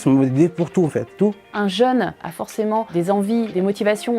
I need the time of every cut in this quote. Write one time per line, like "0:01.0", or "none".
0:01.3
0:02.2